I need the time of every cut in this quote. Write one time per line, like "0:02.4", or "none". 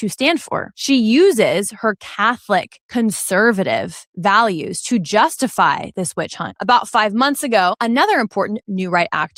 none